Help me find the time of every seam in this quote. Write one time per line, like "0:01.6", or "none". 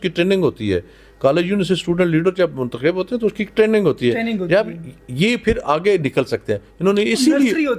none